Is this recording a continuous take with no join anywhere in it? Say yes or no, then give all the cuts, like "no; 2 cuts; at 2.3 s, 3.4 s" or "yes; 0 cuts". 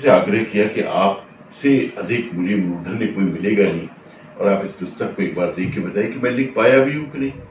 yes; 0 cuts